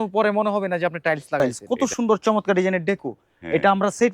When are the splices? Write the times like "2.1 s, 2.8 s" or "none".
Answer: 1.4 s